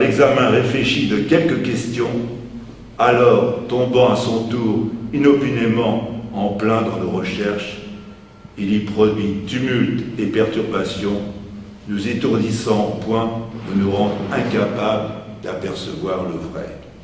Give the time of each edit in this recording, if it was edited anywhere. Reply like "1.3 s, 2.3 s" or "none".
7.7 s